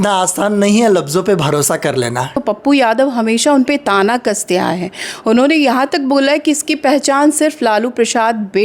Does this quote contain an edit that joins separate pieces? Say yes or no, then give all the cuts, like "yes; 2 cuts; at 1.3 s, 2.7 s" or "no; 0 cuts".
yes; 1 cut; at 2.4 s